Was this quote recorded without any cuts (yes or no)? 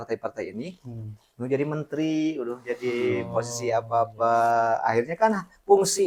yes